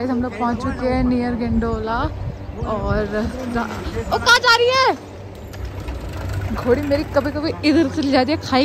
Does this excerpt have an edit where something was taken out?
no; 0 cuts

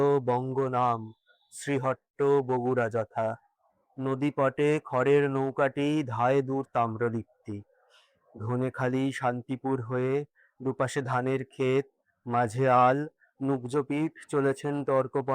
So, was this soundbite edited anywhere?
no; 0 cuts

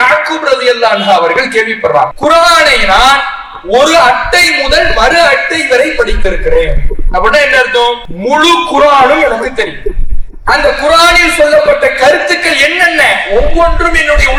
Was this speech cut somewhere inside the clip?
yes; 2 cuts; at 2.1 s, 8.1 s

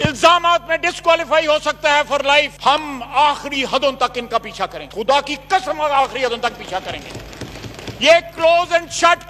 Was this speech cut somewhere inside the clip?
no; 0 cuts

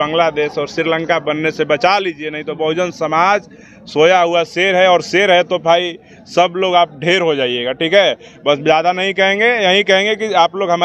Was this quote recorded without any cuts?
yes; 0 cuts

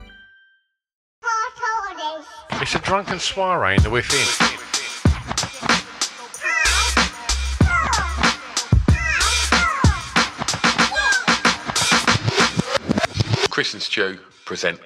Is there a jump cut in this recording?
yes; 1 cut; at 1.0 s

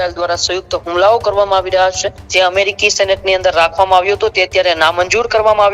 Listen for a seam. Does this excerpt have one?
yes; 1 cut; at 2.1 s

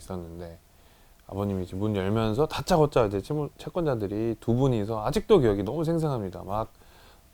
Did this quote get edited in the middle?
no; 0 cuts

